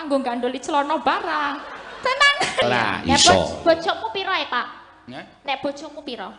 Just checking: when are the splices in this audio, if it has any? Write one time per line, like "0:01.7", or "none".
0:02.6